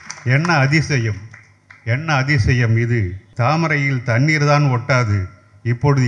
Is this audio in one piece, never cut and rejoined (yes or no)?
no